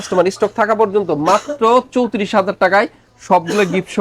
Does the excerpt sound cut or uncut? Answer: uncut